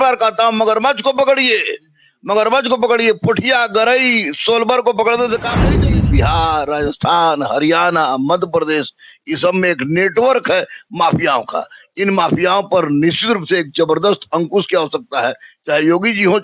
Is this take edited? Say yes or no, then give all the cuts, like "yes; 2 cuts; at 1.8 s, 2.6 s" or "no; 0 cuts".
yes; 1 cut; at 5.8 s